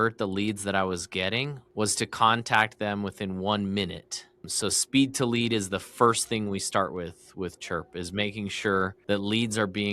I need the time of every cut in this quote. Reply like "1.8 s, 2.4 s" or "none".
1.6 s, 4.5 s, 9.0 s

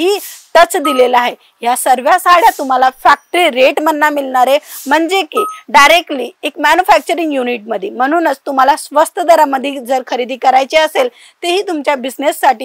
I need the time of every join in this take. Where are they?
none

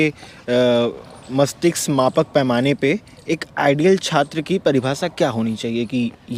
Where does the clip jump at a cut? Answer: none

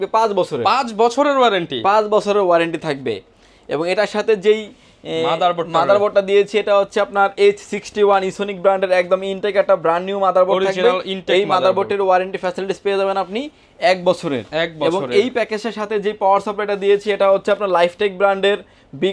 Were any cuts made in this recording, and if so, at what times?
none

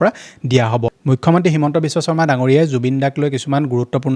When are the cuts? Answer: 0.9 s

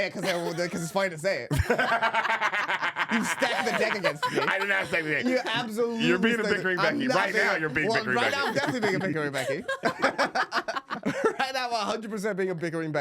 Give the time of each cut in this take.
10.9 s

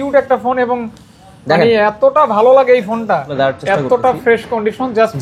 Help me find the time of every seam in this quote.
3.3 s

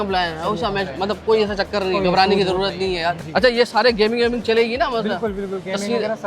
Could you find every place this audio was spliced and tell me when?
3.2 s

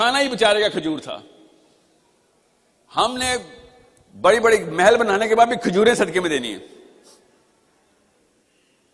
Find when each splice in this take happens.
7.5 s

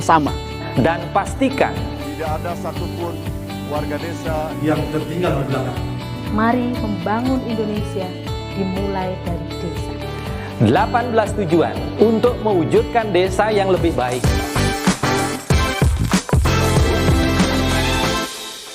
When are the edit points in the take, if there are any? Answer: 14.2 s

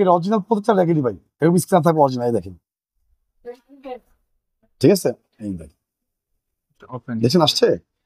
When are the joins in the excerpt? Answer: none

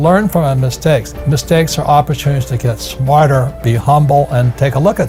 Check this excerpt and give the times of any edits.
none

